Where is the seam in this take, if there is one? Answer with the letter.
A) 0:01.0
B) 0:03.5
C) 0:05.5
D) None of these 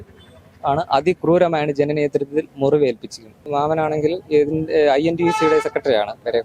B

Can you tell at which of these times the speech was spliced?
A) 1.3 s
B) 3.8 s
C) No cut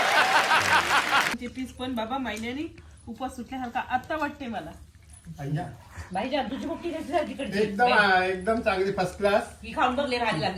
A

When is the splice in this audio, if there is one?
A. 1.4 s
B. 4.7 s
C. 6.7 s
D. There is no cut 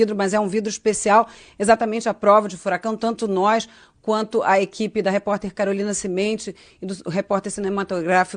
A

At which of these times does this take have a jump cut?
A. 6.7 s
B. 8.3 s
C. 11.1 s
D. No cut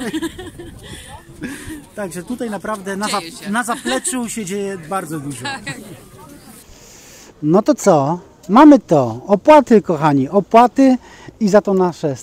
A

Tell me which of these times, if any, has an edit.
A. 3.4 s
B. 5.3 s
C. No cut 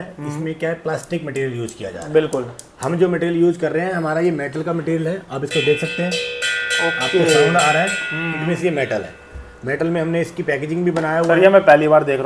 C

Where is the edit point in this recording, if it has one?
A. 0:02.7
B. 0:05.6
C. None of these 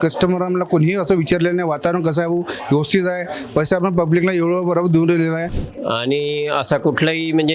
B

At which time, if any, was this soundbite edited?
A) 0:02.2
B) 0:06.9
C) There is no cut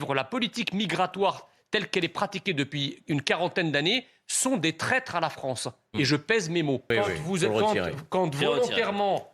B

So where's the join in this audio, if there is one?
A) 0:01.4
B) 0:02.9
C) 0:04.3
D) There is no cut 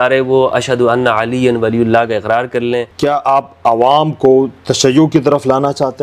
B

